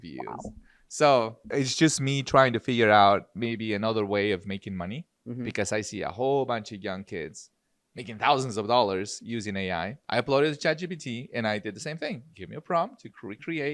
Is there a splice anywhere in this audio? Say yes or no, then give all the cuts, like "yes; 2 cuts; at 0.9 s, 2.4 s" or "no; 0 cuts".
yes; 2 cuts; at 1.5 s, 10.0 s